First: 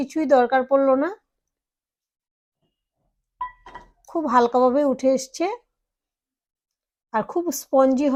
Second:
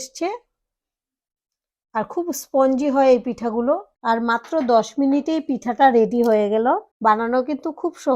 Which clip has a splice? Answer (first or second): second